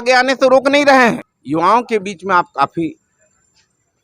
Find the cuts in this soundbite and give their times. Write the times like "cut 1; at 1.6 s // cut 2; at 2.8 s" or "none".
cut 1; at 1.3 s

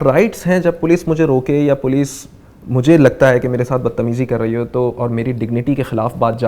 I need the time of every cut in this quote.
none

